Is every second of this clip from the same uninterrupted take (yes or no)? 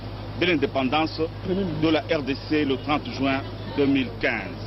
no